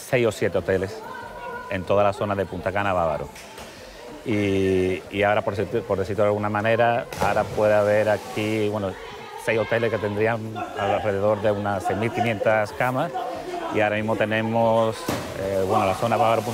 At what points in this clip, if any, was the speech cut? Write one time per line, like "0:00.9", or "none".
none